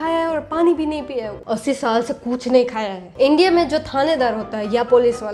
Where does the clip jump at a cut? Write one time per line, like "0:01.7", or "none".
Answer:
0:01.3
0:03.2